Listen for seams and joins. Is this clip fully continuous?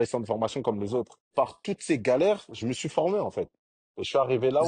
no; 1 cut; at 1.3 s

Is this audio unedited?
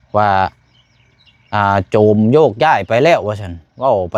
yes; 0 cuts

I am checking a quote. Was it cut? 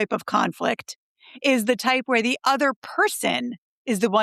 no; 0 cuts

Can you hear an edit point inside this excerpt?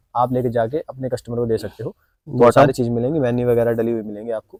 no; 0 cuts

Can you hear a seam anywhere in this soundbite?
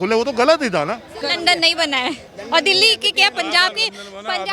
yes; 1 cut; at 1.2 s

